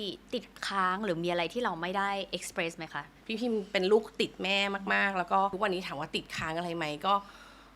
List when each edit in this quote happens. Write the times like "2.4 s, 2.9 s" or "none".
3.2 s, 5.5 s